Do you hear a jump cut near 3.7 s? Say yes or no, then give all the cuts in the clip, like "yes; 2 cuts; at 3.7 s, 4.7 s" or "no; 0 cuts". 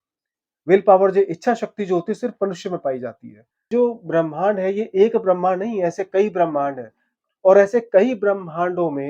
yes; 1 cut; at 3.7 s